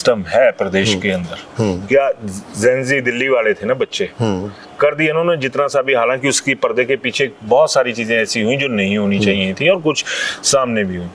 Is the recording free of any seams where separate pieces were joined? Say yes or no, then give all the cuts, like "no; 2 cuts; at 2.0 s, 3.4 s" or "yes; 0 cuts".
yes; 0 cuts